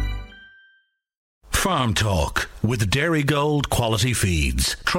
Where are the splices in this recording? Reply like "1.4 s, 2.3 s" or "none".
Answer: 1.2 s